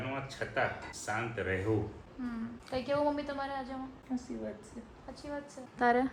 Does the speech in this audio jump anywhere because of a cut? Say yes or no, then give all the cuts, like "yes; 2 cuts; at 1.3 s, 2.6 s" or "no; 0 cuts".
no; 0 cuts